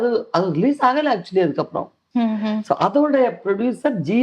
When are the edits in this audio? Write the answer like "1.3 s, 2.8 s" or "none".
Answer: 2.0 s